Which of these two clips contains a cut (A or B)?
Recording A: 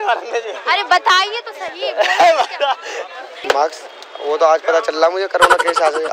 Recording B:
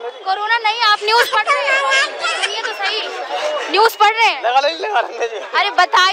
A